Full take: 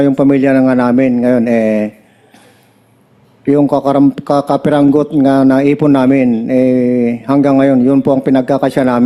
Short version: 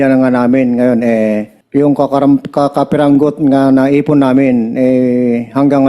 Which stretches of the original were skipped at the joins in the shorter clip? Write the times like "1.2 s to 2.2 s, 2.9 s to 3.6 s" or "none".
2.0 s to 3.3 s